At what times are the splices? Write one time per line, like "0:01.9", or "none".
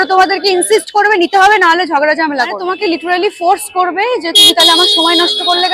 0:02.6